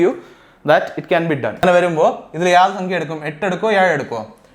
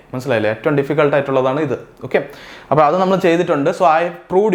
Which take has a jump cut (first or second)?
first